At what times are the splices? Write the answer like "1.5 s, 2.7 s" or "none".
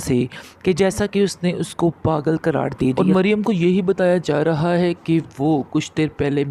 3.0 s

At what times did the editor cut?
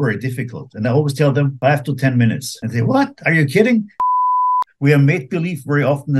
1.5 s, 2.5 s, 4.3 s

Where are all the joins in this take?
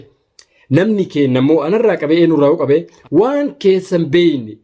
3.0 s

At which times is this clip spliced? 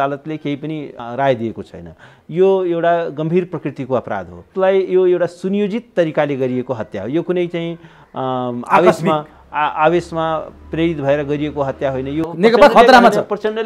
0.9 s, 4.4 s, 12.3 s

